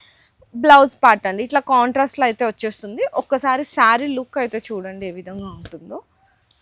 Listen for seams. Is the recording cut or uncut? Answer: uncut